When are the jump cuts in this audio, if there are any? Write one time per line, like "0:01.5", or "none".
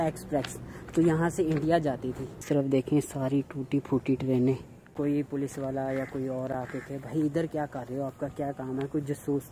0:02.7
0:04.9